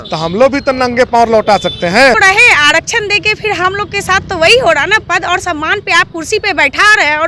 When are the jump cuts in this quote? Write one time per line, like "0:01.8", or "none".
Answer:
0:02.2